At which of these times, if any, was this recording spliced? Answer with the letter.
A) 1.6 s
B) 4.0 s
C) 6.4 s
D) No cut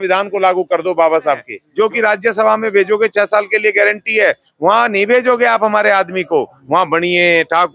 A